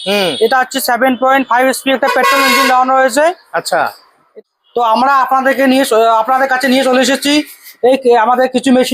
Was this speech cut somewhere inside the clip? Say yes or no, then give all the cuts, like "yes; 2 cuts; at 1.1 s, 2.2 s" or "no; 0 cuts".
yes; 1 cut; at 4.3 s